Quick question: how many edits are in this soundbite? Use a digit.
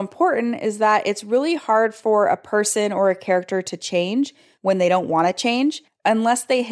0